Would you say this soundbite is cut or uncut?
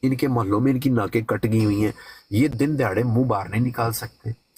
uncut